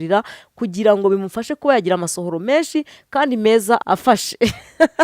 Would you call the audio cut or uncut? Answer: cut